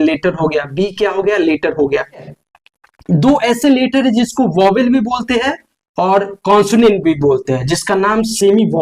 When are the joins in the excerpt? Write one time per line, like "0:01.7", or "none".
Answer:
0:02.4